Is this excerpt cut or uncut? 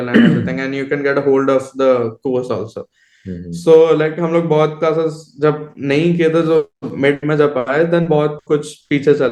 uncut